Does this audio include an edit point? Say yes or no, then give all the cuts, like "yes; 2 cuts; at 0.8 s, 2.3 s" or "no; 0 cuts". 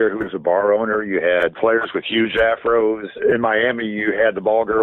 yes; 2 cuts; at 1.6 s, 3.1 s